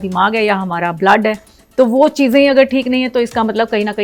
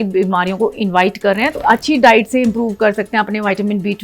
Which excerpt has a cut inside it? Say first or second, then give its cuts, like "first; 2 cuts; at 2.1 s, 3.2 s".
second; 1 cut; at 1.6 s